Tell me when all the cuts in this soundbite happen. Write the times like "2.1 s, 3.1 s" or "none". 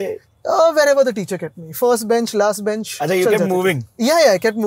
2.9 s